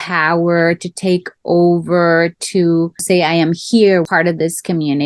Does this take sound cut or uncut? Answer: cut